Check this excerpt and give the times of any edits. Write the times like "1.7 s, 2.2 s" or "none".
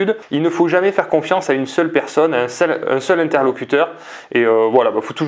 none